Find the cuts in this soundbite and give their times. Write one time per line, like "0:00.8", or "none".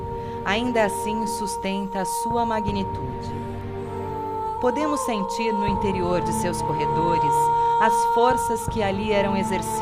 0:08.1

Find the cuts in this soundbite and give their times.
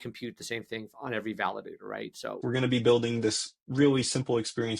0:02.4

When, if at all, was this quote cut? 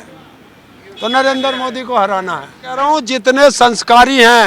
0:02.8

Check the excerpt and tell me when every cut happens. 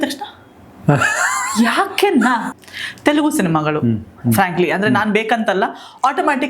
0:02.5

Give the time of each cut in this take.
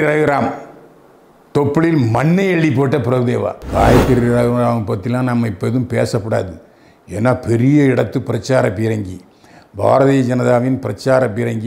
0:03.6

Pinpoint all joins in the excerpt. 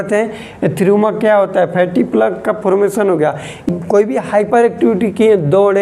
0:03.6

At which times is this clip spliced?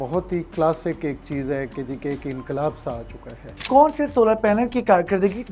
none

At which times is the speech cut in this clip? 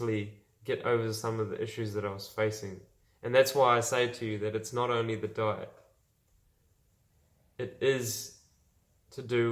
none

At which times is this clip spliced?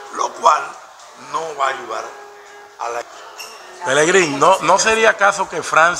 0:03.0

